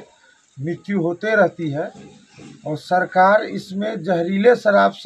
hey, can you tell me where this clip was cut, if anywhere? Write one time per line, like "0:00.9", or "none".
none